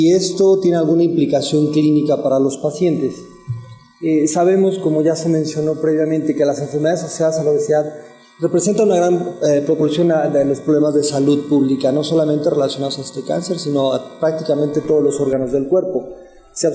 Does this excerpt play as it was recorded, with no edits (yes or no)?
no